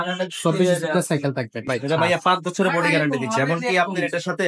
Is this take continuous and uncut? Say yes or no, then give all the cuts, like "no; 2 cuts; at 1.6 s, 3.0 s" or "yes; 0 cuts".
no; 1 cut; at 1.6 s